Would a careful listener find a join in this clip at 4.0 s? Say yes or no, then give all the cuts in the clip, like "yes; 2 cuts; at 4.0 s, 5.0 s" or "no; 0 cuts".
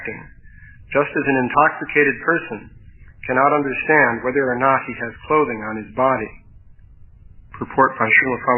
no; 0 cuts